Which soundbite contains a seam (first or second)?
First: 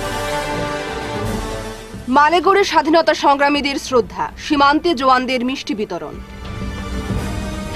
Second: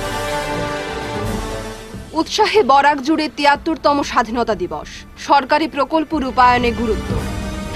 first